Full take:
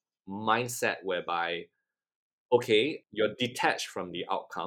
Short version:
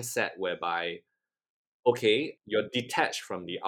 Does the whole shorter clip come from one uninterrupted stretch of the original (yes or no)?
yes